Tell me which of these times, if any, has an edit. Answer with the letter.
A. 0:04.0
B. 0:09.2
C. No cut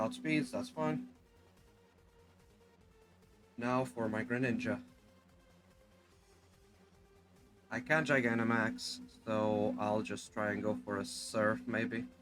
C